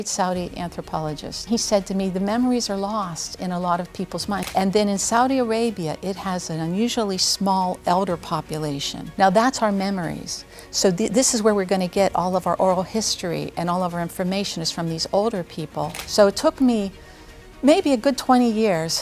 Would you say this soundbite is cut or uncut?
cut